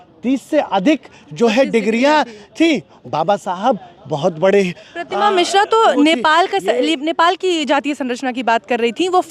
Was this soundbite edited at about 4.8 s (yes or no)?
no